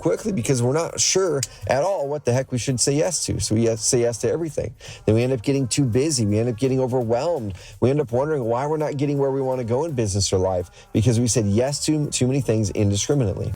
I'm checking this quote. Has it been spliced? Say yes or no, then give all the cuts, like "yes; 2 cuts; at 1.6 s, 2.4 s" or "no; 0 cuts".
yes; 1 cut; at 12.1 s